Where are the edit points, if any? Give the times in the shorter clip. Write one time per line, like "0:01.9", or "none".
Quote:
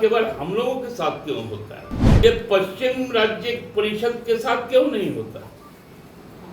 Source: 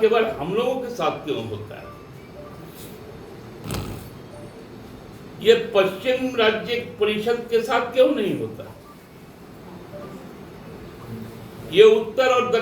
0:02.0

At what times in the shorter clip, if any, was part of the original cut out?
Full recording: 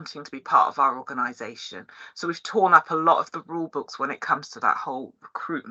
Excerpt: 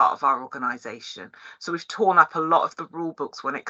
none

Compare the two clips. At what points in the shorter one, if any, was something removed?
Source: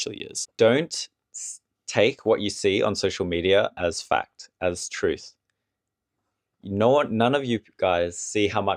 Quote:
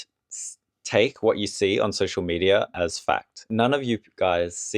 0:03.5

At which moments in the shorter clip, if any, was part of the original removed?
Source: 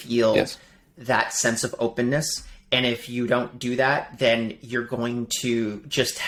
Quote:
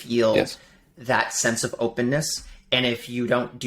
none

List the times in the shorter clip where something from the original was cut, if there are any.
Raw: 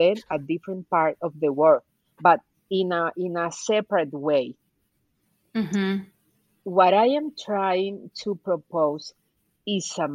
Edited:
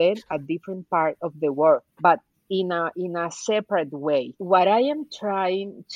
0:01.9
0:04.4

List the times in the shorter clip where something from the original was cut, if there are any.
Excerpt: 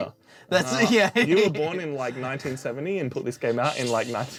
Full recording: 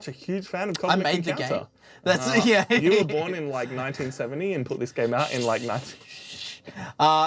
none

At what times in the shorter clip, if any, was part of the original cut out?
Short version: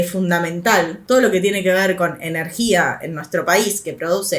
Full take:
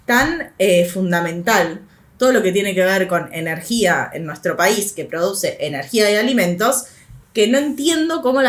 0:01.0

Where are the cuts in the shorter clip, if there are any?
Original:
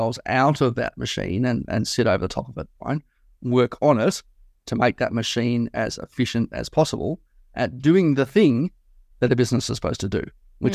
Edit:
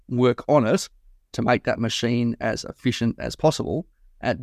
none

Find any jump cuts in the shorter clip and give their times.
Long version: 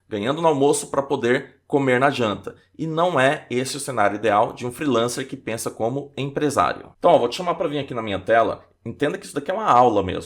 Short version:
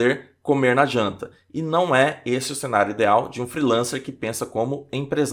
none

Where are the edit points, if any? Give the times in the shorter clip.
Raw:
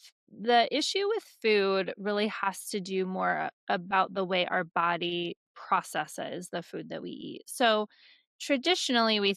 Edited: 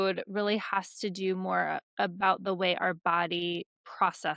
none

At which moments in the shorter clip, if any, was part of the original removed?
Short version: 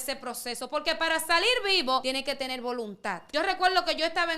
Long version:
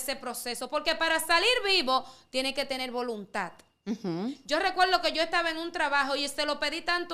0:02.0
0:03.2

